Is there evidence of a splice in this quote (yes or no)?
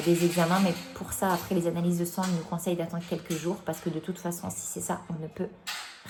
no